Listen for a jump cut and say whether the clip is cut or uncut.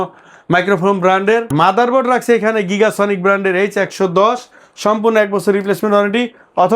cut